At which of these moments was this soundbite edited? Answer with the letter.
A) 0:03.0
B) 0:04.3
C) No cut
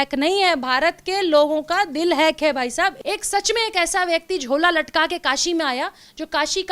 A